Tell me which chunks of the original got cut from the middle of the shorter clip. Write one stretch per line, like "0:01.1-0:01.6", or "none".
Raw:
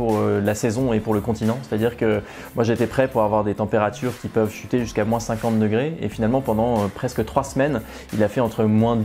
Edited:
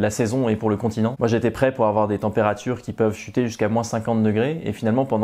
0:01.6-0:02.5